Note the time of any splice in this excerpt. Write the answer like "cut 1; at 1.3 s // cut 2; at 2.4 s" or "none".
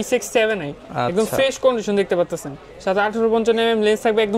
none